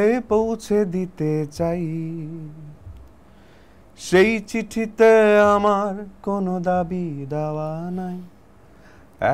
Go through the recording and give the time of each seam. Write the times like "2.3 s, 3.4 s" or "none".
none